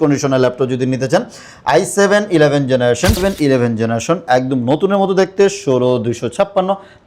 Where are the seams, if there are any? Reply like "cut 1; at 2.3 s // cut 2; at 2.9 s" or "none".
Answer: cut 1; at 3.2 s